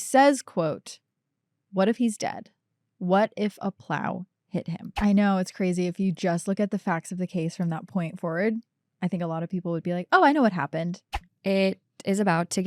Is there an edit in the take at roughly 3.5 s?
no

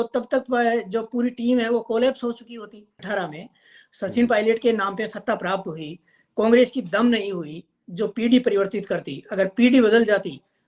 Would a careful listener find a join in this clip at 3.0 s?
yes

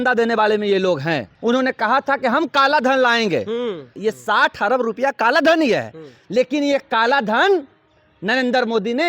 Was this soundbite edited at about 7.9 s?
no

